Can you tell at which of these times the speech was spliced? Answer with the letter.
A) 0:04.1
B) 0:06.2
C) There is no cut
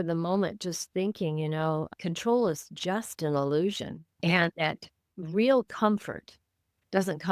A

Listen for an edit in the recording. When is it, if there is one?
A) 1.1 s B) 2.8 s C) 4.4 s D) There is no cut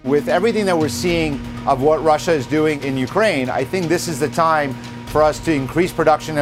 B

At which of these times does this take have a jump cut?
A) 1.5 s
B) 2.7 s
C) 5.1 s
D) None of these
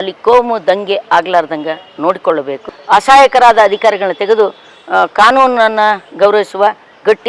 B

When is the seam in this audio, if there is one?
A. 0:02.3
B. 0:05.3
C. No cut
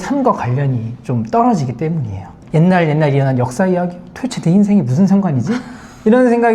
A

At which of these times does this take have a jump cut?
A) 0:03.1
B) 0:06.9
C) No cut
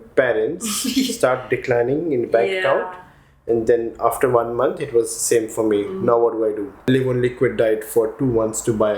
B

